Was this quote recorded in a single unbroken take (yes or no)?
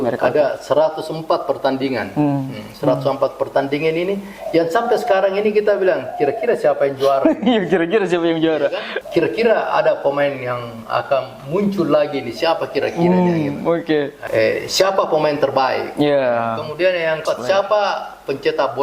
no